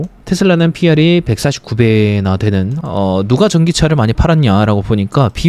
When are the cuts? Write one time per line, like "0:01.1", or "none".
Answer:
0:02.8